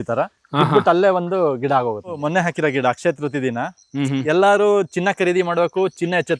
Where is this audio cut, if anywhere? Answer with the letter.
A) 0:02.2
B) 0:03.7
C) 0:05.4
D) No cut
A